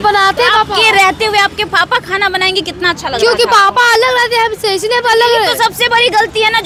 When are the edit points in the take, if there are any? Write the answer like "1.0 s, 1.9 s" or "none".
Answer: none